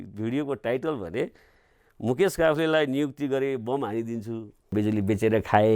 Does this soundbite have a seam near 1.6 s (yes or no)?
no